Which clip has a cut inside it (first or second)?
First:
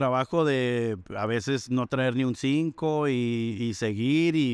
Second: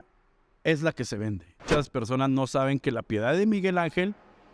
second